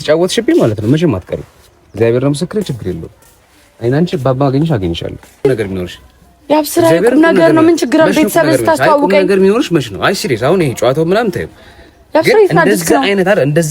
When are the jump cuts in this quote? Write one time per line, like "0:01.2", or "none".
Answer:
0:05.4